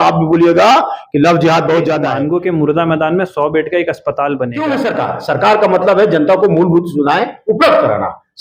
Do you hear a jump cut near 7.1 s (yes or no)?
no